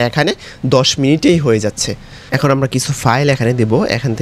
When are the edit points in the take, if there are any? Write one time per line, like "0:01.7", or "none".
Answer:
0:02.3